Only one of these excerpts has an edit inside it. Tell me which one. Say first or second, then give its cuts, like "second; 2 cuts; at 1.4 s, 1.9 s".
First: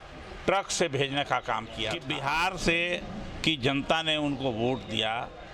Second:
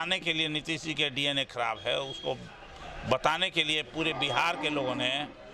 first; 1 cut; at 2.1 s